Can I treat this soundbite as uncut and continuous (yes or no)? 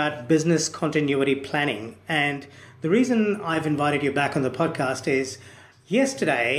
yes